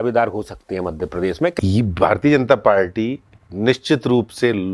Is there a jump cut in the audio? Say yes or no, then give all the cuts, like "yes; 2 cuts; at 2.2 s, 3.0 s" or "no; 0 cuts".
yes; 1 cut; at 1.6 s